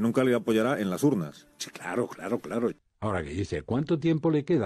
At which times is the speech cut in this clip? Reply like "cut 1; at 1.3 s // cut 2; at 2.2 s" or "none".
cut 1; at 2.9 s